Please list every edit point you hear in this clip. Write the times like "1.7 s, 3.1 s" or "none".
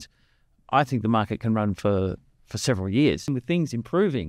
3.3 s